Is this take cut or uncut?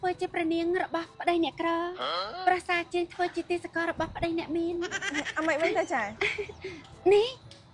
uncut